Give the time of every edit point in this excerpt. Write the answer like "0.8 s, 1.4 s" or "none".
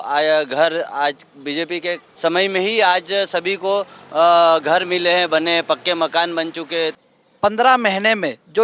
2.1 s, 7.0 s